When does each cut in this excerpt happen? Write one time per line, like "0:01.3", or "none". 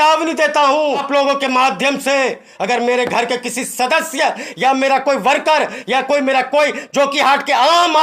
0:01.1